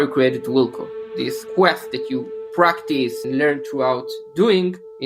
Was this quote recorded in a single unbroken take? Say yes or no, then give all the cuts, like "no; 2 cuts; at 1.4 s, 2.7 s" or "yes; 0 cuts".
no; 2 cuts; at 1.4 s, 3.2 s